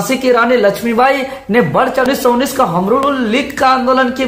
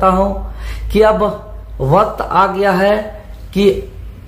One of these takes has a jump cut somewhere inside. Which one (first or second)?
first